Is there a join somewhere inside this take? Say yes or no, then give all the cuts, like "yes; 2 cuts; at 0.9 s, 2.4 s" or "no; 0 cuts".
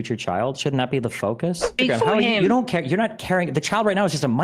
yes; 1 cut; at 1.8 s